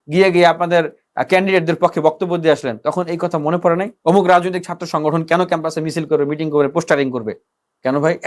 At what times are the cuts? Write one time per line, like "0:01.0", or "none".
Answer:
0:03.9

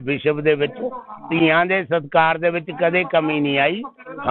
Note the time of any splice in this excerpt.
none

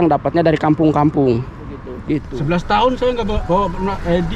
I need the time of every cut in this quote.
0:02.0

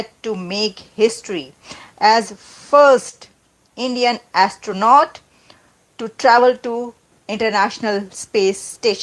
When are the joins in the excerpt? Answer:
none

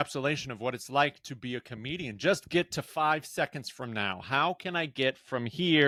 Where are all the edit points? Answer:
none

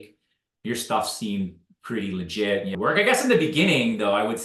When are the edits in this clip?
0:02.8

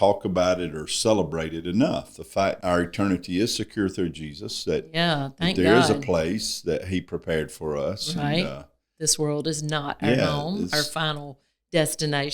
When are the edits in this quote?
0:02.6

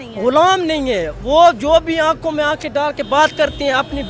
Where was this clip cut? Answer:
none

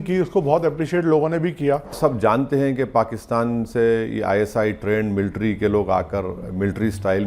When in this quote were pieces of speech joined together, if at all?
0:02.0

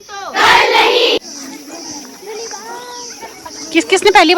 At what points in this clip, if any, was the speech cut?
0:01.2

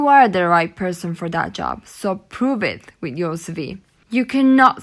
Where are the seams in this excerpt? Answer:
none

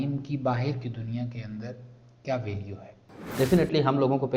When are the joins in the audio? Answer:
0:03.3

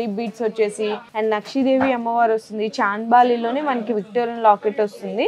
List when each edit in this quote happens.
0:01.0

